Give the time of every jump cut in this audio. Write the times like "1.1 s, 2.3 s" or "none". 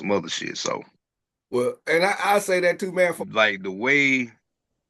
3.3 s